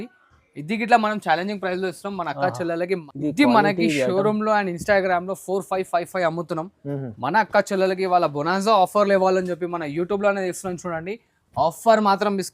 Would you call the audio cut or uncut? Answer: cut